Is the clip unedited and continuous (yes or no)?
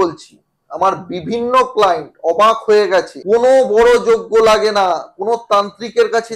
no